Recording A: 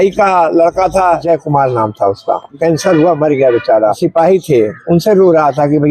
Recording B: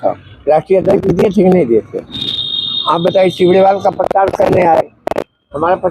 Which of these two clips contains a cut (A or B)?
A